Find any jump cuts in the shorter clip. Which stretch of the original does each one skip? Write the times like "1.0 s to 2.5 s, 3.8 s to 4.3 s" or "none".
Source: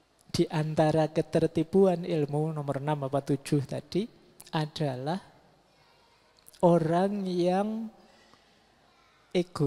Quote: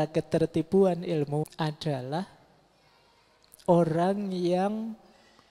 2.5 s to 4.4 s